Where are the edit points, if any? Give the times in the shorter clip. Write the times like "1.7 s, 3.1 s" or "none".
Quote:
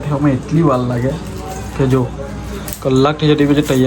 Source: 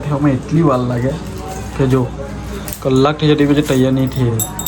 none